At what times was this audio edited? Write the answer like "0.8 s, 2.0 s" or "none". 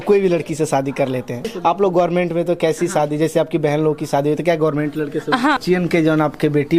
1.5 s, 5.6 s